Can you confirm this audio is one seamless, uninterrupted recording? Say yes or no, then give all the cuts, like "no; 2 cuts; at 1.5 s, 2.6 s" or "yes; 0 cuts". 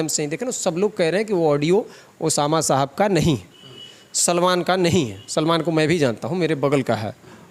yes; 0 cuts